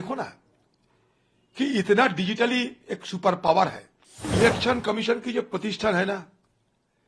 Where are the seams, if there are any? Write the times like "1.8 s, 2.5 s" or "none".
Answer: 4.3 s